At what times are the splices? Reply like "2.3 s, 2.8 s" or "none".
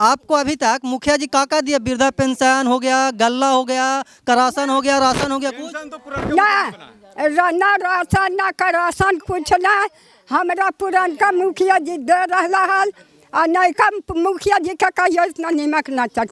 none